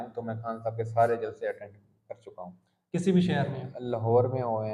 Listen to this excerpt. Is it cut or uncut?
uncut